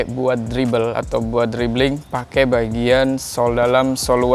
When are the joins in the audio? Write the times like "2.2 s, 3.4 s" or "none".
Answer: none